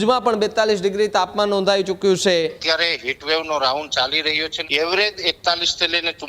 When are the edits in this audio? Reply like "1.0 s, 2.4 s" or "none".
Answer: 2.6 s, 4.5 s